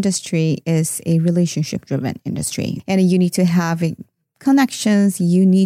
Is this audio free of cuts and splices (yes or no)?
no